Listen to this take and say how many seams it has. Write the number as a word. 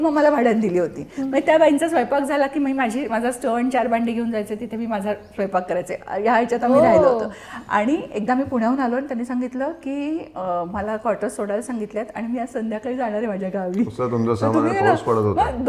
zero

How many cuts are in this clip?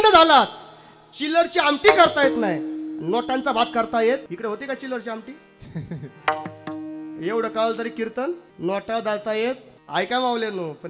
three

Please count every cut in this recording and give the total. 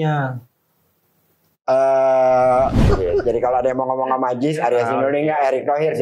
one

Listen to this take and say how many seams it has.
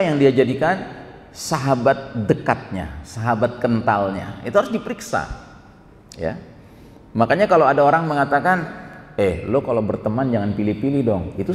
zero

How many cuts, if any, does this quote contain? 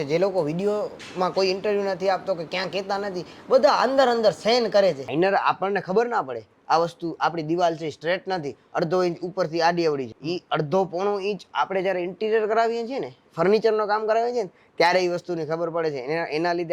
two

